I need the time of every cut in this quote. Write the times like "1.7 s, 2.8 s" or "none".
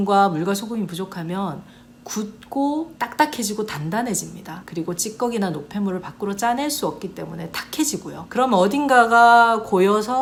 none